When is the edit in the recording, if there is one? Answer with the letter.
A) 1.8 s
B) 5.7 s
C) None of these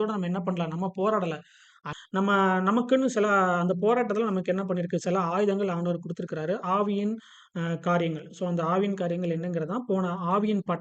A